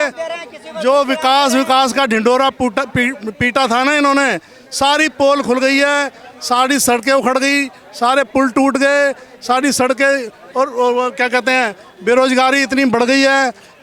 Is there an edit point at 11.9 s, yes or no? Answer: no